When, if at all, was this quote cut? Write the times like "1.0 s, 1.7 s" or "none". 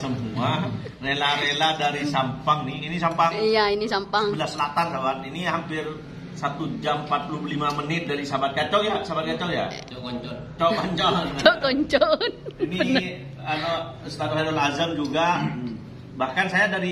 none